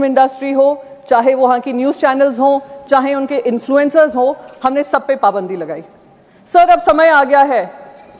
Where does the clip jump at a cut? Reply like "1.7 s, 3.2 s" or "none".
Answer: none